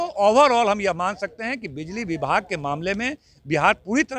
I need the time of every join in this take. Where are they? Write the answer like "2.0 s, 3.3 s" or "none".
none